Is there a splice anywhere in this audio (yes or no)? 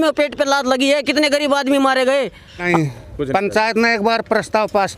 yes